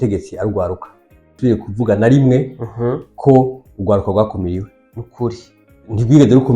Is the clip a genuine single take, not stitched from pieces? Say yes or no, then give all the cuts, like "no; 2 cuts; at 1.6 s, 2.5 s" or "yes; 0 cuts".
no; 1 cut; at 1.3 s